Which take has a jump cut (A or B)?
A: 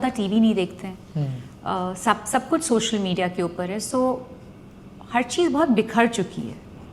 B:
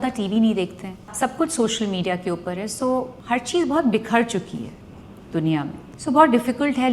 B